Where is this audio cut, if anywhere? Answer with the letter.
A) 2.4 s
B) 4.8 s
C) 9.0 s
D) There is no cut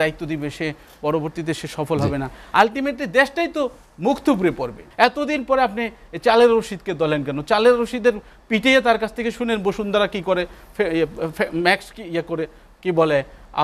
B